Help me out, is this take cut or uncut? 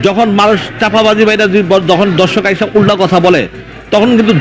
uncut